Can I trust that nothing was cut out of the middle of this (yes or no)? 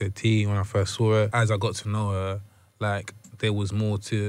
no